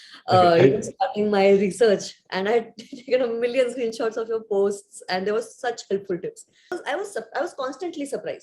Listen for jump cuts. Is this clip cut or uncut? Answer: cut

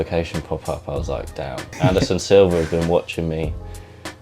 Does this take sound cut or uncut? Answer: cut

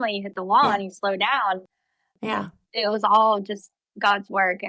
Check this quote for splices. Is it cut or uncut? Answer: cut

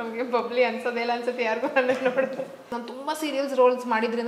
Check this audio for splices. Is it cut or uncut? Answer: cut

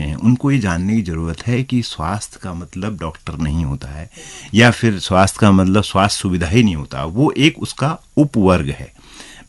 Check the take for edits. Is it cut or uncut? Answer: uncut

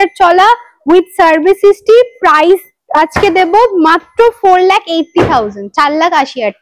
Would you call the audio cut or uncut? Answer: uncut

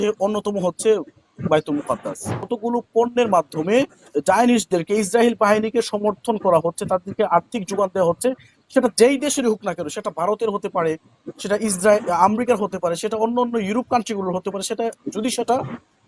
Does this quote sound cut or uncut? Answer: cut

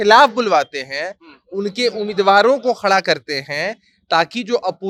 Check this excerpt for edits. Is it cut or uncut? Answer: uncut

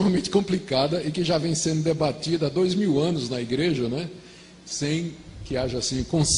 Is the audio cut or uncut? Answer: cut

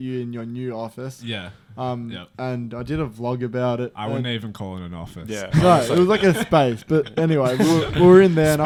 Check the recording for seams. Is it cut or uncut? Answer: uncut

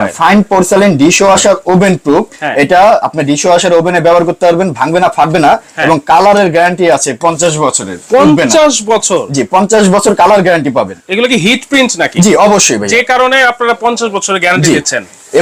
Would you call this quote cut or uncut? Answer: uncut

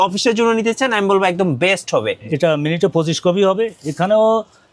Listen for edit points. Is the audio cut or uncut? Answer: cut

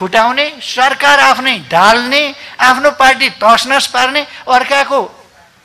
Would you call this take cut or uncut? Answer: uncut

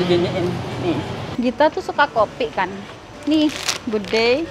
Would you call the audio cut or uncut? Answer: cut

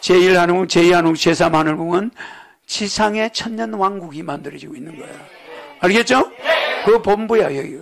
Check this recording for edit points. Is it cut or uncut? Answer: uncut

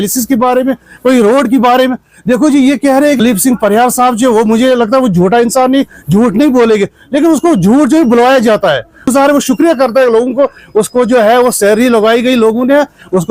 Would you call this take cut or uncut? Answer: cut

